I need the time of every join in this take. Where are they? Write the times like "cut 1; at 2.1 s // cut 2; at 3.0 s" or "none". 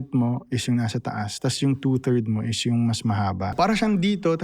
cut 1; at 3.5 s